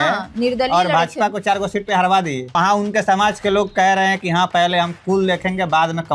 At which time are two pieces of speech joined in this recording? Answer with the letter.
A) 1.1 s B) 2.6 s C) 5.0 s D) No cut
B